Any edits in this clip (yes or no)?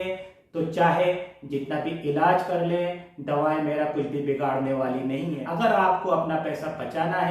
yes